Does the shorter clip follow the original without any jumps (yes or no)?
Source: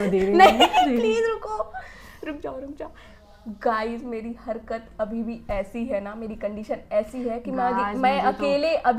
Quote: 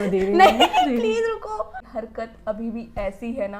no